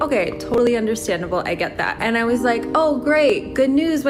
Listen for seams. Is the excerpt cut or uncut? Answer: cut